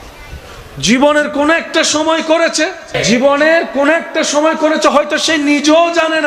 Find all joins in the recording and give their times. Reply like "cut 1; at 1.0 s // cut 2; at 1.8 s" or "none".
cut 1; at 2.9 s